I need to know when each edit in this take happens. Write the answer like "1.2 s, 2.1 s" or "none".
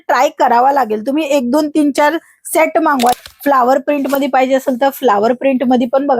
3.2 s